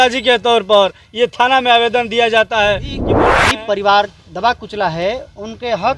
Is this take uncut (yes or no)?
no